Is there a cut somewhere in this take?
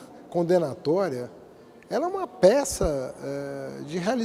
no; 0 cuts

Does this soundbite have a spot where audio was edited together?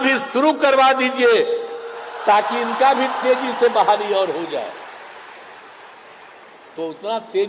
no; 0 cuts

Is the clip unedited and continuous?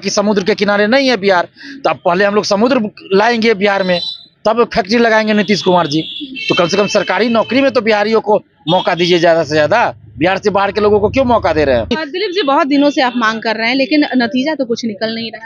no; 1 cut; at 12.2 s

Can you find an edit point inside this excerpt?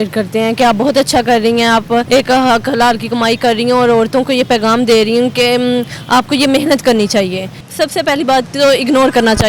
yes; 2 cuts; at 2.1 s, 7.6 s

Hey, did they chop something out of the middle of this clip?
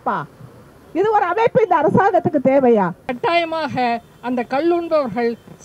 yes; 1 cut; at 3.1 s

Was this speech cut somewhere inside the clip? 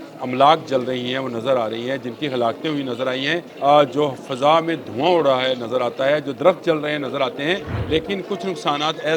yes; 2 cuts; at 3.5 s, 7.7 s

